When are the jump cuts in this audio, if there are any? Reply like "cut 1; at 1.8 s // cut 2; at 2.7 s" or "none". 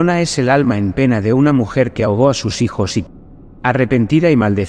cut 1; at 3.1 s